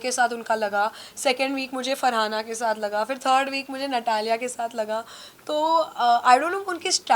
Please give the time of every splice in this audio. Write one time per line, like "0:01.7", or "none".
none